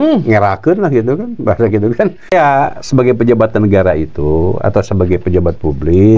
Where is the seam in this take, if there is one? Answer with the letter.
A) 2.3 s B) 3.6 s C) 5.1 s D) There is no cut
A